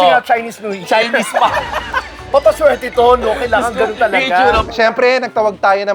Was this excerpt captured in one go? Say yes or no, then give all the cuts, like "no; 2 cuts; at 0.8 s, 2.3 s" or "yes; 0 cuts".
no; 1 cut; at 4.7 s